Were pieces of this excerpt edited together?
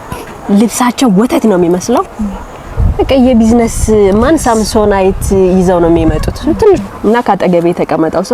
yes; 1 cut; at 6.8 s

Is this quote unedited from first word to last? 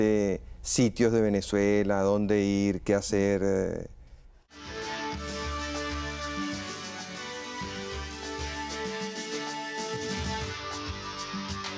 no; 1 cut; at 4.6 s

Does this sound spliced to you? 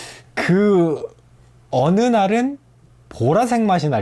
no; 0 cuts

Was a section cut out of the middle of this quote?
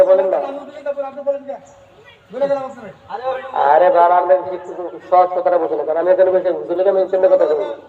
no; 0 cuts

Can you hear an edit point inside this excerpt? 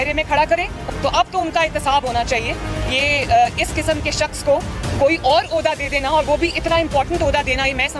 no; 0 cuts

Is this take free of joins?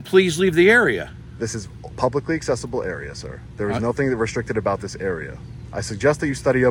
yes; 0 cuts

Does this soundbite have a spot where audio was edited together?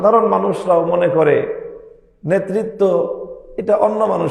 no; 0 cuts

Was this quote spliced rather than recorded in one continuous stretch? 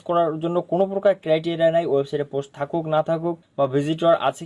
no; 0 cuts

